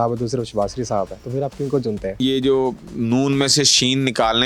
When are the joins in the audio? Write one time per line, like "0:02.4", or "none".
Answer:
0:01.2
0:02.2